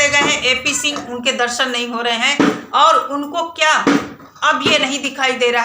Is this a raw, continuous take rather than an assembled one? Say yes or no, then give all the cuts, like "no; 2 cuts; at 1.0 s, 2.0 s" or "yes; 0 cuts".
no; 1 cut; at 1.0 s